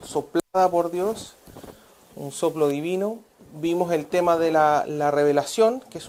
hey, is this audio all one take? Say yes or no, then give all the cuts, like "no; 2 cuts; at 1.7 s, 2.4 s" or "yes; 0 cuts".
yes; 0 cuts